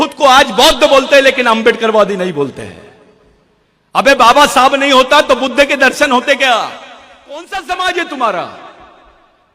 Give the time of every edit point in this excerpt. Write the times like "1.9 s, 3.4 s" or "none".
7.4 s